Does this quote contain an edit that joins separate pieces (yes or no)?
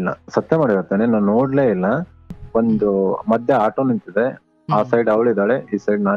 yes